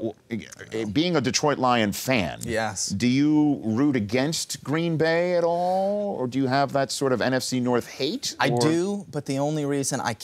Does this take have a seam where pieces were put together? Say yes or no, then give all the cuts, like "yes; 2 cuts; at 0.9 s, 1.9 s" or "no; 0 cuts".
no; 0 cuts